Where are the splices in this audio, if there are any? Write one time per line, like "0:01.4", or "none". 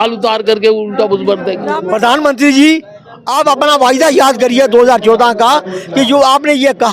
0:01.6